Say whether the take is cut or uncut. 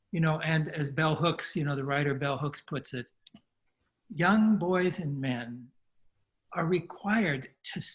uncut